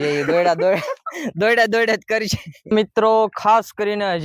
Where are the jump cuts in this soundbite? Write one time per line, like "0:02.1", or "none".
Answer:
0:02.7